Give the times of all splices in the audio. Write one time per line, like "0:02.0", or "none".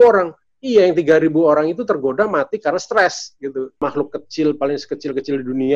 0:03.8